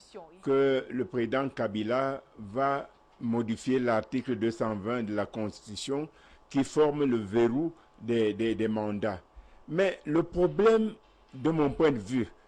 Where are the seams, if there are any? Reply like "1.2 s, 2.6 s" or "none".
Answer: none